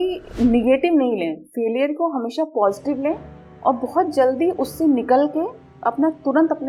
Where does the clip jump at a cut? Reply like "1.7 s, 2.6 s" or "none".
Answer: none